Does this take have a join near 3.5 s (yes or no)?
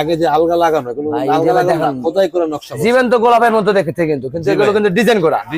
no